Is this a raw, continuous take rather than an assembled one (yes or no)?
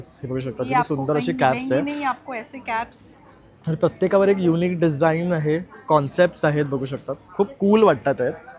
yes